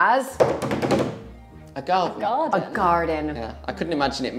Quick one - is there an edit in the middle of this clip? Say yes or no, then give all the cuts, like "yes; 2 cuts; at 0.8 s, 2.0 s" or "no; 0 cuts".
no; 0 cuts